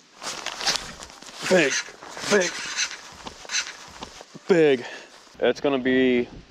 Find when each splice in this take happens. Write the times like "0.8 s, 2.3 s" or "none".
5.3 s